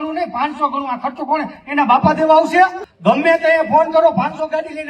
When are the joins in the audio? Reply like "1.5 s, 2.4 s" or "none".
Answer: 2.8 s